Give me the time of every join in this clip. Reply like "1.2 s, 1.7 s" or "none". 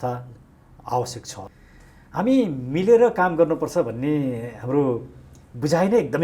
1.4 s